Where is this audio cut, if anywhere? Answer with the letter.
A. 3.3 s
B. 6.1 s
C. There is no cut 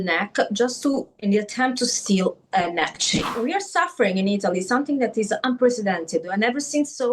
A